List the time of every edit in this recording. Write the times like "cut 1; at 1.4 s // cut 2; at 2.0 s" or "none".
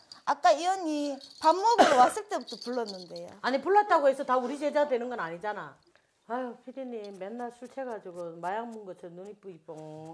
none